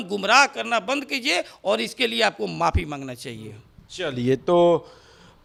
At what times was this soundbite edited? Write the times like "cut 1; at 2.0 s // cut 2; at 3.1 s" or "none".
none